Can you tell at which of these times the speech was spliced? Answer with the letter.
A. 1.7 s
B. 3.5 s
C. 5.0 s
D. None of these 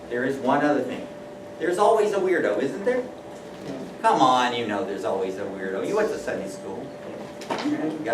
A